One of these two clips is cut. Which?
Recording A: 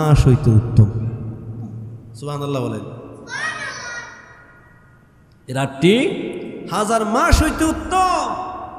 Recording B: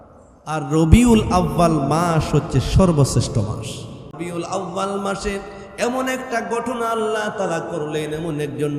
B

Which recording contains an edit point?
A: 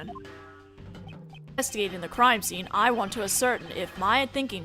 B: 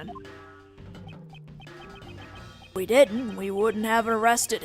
B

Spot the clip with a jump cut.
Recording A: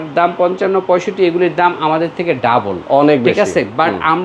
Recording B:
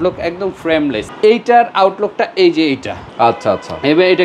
B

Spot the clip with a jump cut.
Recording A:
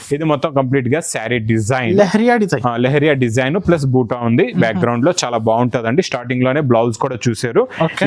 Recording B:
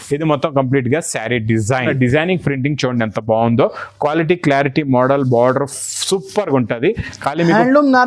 B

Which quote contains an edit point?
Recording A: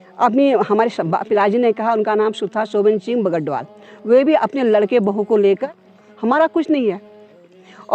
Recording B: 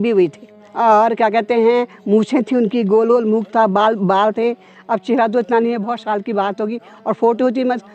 A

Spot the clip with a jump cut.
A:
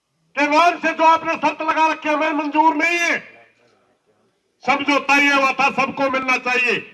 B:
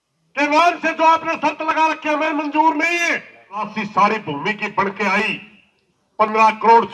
B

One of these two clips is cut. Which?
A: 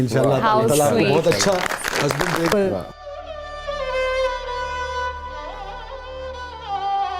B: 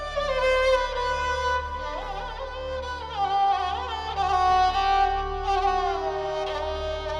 A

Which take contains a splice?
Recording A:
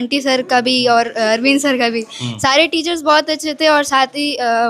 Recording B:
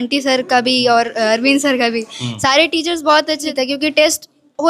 B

